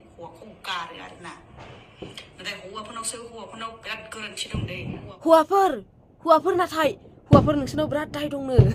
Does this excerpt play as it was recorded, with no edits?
yes; 0 cuts

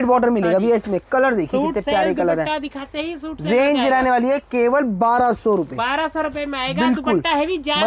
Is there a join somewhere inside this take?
no; 0 cuts

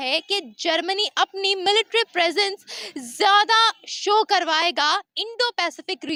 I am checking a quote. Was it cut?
no; 0 cuts

